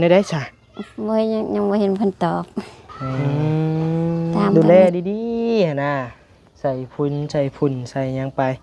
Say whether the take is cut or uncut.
cut